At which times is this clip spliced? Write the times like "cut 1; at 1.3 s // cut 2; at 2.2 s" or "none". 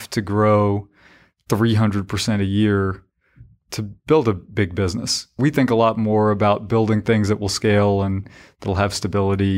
cut 1; at 5.2 s